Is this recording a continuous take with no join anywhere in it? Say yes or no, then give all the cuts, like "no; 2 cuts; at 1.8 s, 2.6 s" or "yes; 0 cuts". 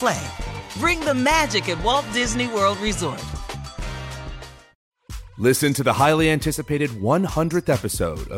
no; 1 cut; at 4.8 s